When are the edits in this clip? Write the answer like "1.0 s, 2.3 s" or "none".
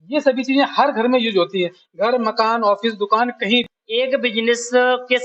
3.7 s